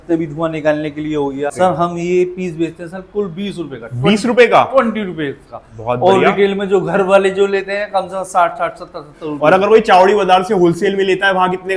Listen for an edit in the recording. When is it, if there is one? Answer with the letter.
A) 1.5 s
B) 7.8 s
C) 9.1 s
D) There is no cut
A